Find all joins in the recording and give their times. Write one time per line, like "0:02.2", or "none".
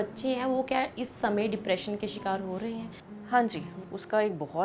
0:03.0
0:03.7